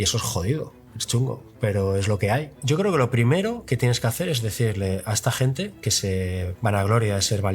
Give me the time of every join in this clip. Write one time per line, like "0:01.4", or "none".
0:02.6
0:06.5